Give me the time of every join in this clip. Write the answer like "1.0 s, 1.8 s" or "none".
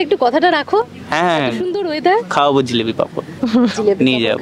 none